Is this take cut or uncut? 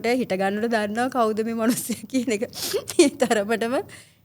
uncut